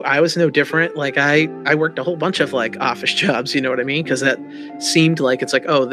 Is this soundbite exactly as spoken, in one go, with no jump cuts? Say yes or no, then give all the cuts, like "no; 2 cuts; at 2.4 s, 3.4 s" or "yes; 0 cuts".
yes; 0 cuts